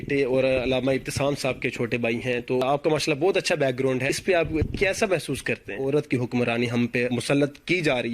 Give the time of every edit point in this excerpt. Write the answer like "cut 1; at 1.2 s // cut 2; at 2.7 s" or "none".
cut 1; at 2.6 s // cut 2; at 4.4 s // cut 3; at 5.8 s // cut 4; at 7.1 s